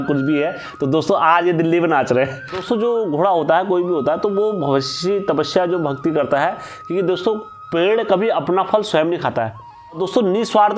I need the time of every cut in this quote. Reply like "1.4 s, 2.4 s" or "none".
2.6 s, 10.0 s

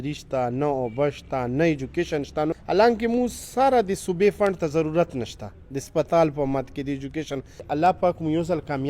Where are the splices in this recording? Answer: 2.5 s, 7.6 s

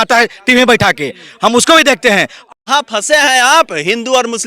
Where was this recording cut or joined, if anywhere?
2.4 s

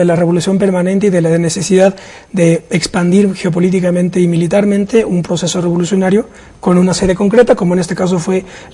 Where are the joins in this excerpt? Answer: 1.8 s

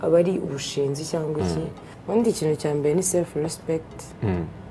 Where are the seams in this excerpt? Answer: 1.9 s

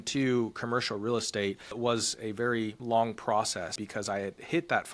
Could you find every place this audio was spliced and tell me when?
1.8 s, 2.8 s, 3.8 s

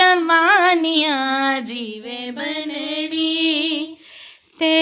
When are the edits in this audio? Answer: none

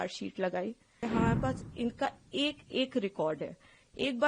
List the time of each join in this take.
1.0 s

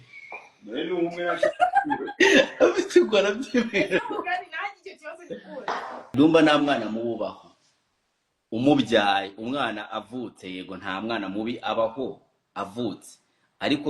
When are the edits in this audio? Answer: 6.1 s

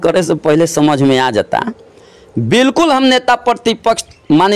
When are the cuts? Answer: none

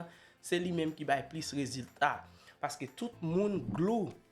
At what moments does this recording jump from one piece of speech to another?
none

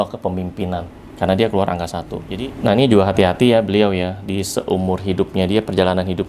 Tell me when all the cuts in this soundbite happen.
2.2 s

